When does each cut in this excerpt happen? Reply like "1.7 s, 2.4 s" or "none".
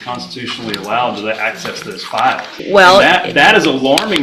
2.5 s